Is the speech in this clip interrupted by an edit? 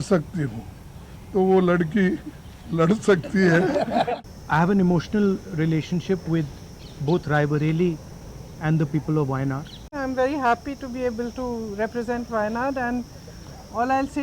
yes; 2 cuts; at 4.2 s, 9.9 s

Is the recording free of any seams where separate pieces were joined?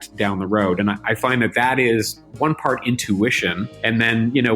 no; 2 cuts; at 2.2 s, 3.7 s

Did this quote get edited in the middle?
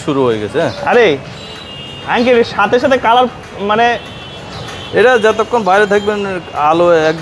no; 0 cuts

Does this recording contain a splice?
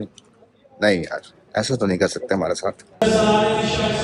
yes; 1 cut; at 2.9 s

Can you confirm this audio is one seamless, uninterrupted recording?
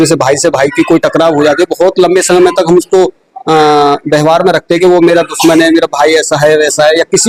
yes; 0 cuts

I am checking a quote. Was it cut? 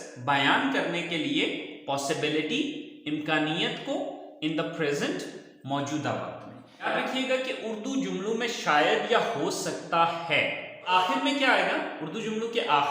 yes; 2 cuts; at 6.9 s, 10.9 s

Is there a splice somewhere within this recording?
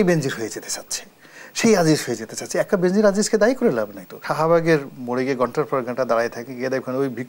yes; 1 cut; at 4.2 s

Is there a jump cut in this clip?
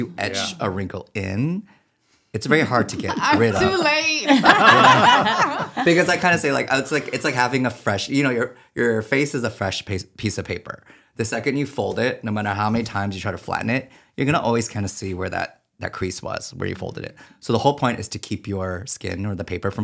no; 0 cuts

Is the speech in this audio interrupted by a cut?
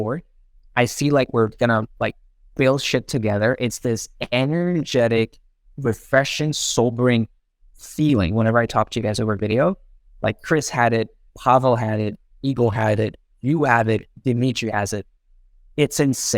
no; 0 cuts

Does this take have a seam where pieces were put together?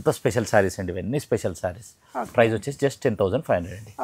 no; 0 cuts

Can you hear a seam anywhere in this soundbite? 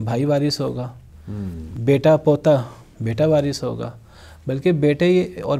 no; 0 cuts

